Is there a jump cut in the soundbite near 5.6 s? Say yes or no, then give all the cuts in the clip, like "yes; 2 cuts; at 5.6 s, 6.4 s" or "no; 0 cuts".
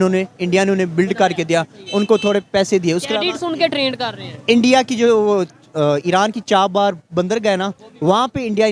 no; 0 cuts